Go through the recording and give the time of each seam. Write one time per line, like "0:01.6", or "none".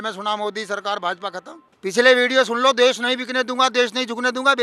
0:01.7